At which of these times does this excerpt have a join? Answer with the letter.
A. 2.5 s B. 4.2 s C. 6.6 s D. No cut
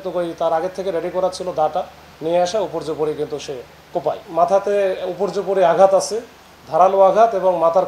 B